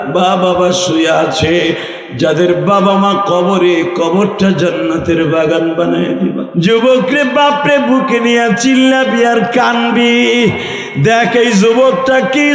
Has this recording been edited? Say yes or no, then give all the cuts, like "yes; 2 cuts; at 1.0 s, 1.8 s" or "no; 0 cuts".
yes; 1 cut; at 6.4 s